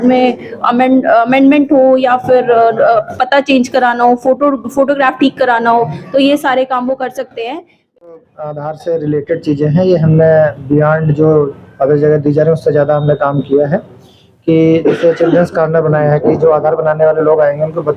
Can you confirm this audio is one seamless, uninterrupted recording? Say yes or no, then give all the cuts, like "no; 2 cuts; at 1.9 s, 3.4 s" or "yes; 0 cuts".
no; 1 cut; at 8.1 s